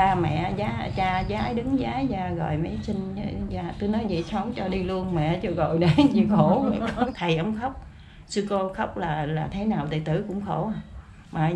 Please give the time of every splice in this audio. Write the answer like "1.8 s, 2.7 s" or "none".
7.1 s